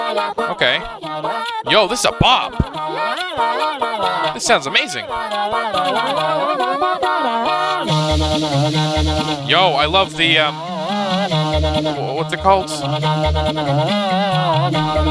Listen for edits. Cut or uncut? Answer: uncut